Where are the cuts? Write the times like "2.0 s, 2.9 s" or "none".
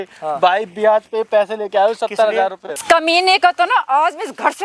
2.8 s